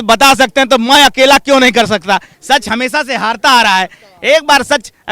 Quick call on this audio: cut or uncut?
cut